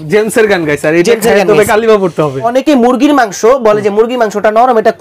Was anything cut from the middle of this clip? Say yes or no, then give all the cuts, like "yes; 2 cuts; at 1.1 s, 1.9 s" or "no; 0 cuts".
yes; 1 cut; at 2.5 s